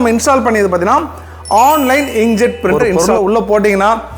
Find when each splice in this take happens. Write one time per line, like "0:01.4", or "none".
0:02.9